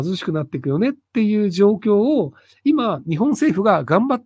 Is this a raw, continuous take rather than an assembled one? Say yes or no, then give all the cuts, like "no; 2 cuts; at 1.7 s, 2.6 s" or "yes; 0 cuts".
yes; 0 cuts